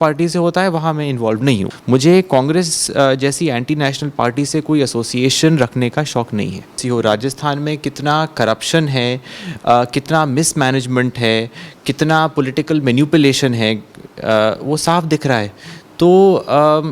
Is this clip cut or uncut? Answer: cut